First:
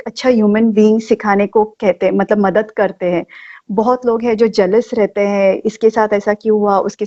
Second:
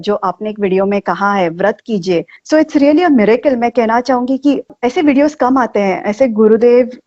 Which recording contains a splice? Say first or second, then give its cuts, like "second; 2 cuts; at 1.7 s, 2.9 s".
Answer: second; 2 cuts; at 2.4 s, 4.7 s